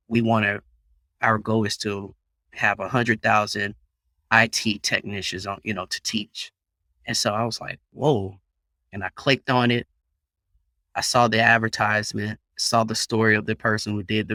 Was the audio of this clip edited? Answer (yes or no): no